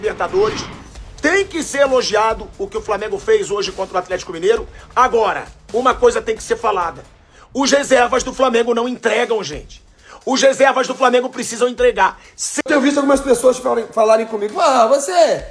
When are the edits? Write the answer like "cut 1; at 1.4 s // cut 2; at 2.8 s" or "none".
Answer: cut 1; at 12.5 s